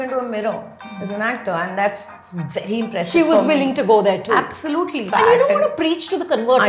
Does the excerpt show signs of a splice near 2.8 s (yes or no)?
no